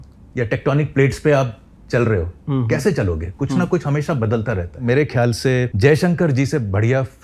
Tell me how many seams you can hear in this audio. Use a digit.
2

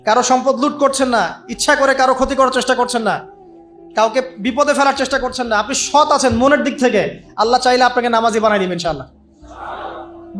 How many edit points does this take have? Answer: 0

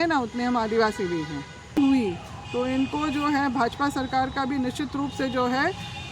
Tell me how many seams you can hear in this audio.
1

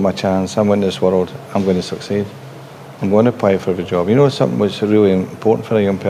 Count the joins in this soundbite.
0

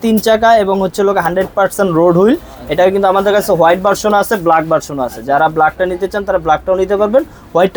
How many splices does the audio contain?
0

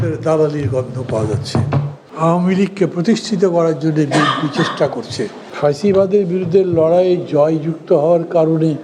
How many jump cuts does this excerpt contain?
2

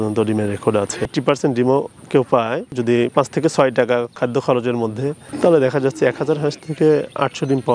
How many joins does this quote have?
1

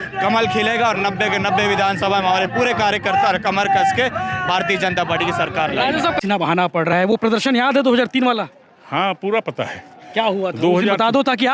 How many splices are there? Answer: 1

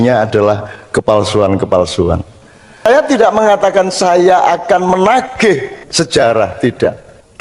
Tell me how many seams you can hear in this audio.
1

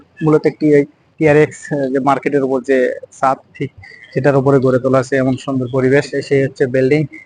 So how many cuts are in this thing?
1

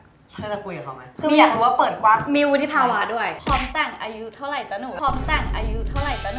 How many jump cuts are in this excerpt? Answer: 0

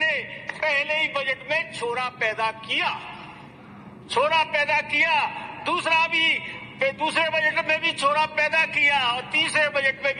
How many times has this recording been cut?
0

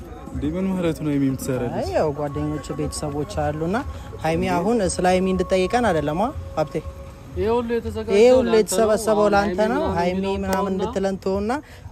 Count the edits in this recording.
0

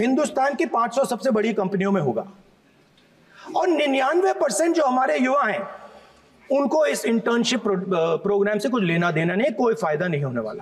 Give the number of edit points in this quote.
0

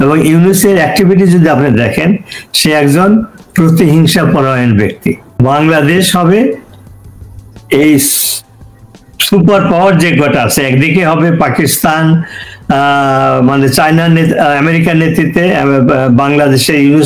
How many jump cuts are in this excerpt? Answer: 1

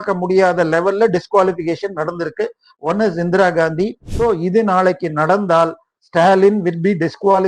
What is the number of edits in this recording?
1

